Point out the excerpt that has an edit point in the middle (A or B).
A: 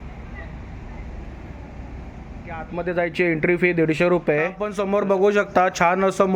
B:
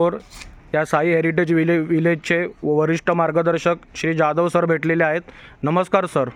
A